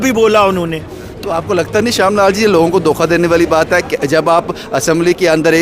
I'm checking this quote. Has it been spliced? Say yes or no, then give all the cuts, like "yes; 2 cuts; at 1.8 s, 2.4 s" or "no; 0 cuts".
yes; 1 cut; at 1.2 s